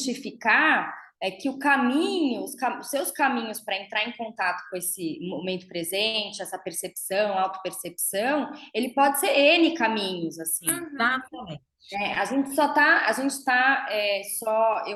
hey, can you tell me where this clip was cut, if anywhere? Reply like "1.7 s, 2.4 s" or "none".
none

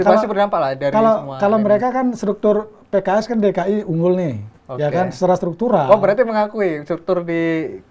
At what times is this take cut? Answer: none

